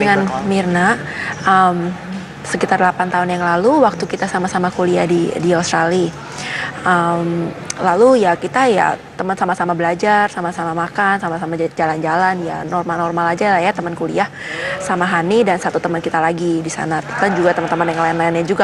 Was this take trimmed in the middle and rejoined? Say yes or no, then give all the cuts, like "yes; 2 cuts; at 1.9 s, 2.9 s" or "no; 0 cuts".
no; 0 cuts